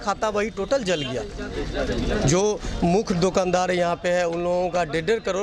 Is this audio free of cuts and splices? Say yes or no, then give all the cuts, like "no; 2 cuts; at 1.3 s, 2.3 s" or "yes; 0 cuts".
yes; 0 cuts